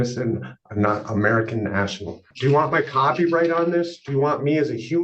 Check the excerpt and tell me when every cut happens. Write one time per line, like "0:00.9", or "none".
0:02.3